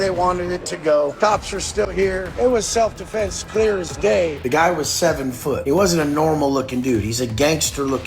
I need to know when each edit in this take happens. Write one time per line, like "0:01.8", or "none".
0:01.1
0:02.4
0:04.4
0:05.6